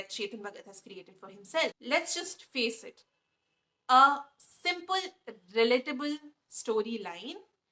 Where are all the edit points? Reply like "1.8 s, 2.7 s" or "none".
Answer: 1.8 s